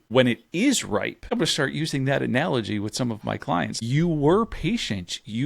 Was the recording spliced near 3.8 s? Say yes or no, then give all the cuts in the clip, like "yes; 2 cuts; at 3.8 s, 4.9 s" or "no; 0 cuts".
yes; 2 cuts; at 1.3 s, 3.8 s